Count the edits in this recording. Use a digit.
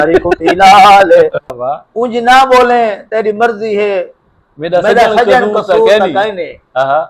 1